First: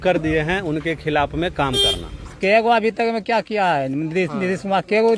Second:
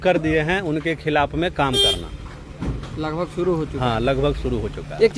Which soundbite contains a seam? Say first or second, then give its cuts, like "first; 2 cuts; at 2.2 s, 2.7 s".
first; 1 cut; at 2.3 s